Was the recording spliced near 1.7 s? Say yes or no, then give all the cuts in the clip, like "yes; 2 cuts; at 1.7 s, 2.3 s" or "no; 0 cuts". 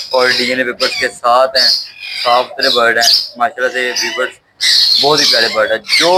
no; 0 cuts